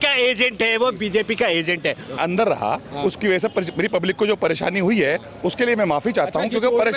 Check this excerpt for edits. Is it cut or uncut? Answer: cut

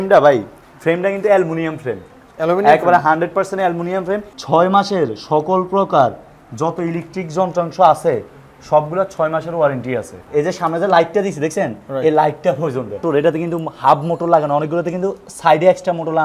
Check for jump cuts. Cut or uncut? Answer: cut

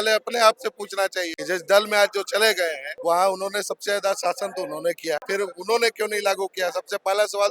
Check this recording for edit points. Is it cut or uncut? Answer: cut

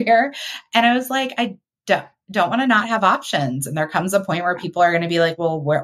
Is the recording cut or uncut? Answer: uncut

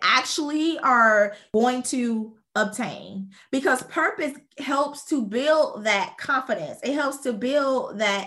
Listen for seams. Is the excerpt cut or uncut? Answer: cut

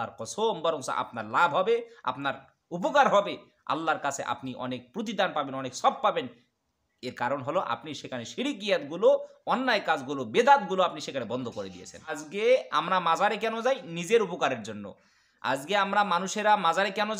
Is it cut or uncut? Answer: cut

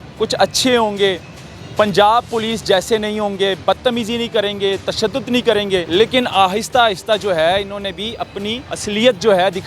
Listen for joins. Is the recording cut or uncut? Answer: cut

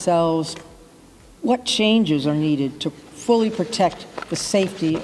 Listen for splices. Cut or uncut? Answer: uncut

